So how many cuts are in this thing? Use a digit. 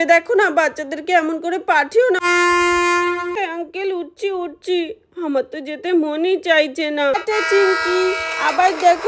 3